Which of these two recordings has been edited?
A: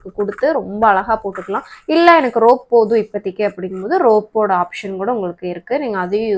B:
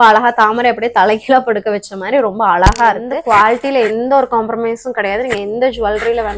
B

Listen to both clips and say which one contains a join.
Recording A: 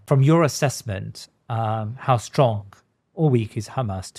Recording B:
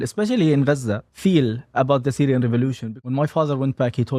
B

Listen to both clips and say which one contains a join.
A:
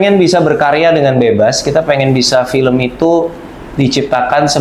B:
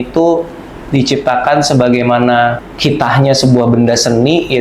B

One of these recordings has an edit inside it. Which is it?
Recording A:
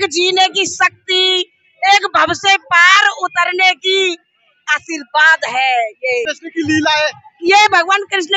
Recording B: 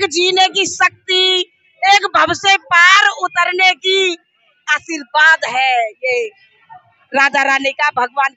A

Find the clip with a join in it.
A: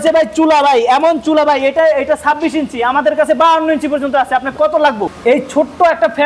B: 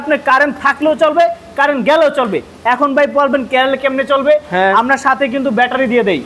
A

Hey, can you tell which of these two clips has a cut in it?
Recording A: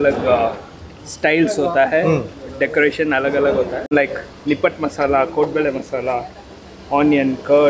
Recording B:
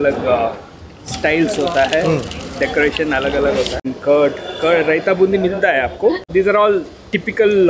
B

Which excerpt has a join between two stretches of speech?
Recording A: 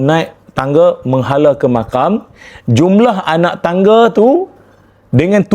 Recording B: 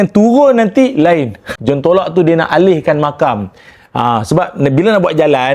B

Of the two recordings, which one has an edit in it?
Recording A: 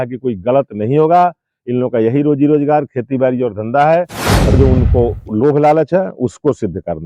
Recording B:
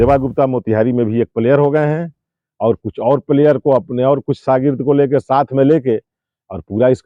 A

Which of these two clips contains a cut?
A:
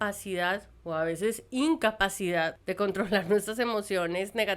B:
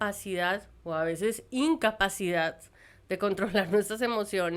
A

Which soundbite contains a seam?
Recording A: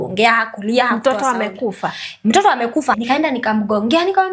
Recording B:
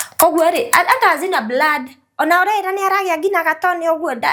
A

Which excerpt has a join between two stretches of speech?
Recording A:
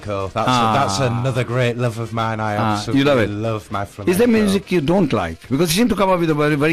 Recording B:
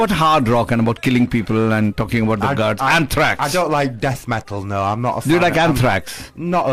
B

